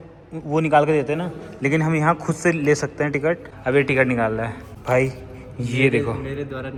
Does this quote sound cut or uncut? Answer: uncut